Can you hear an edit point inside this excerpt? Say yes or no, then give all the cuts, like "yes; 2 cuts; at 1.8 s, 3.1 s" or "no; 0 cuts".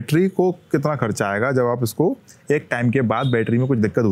no; 0 cuts